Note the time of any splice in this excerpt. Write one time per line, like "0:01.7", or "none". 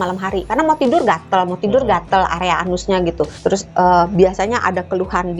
0:03.3